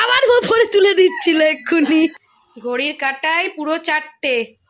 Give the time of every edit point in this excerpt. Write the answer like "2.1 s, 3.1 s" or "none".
2.1 s

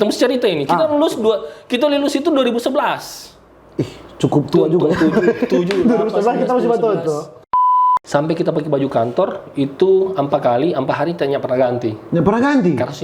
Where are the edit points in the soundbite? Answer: 7.8 s

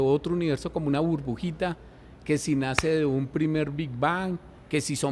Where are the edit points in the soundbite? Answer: none

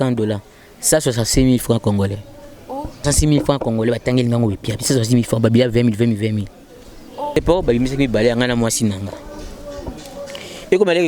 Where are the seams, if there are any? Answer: 2.9 s, 7.3 s

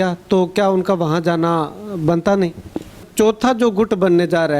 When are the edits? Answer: 3.1 s

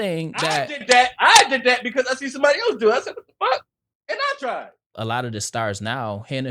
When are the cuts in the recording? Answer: 4.9 s

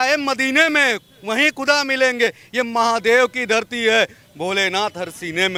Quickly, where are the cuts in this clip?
none

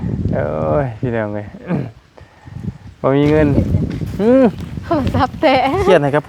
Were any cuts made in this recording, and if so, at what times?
3.5 s

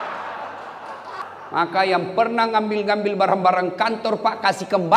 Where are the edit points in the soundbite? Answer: 1.2 s

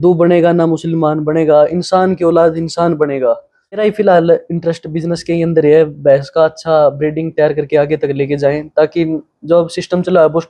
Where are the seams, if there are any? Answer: 3.8 s

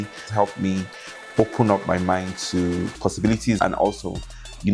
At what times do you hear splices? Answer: 3.6 s

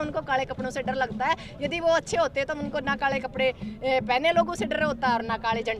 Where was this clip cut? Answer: none

